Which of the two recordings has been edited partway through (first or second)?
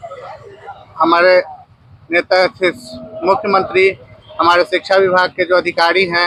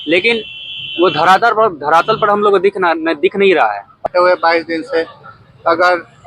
second